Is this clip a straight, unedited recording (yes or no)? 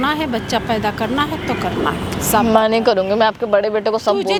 yes